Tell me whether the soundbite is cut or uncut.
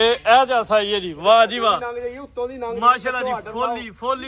uncut